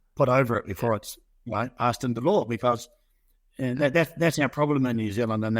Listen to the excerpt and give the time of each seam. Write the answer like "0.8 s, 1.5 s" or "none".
none